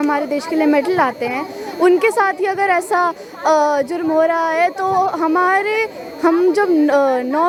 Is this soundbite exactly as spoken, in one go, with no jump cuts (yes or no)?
yes